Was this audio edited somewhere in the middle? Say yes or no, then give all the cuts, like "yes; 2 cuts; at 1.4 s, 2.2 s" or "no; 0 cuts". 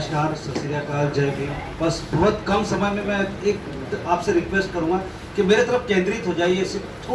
no; 0 cuts